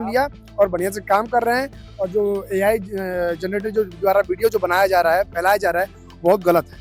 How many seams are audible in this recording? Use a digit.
0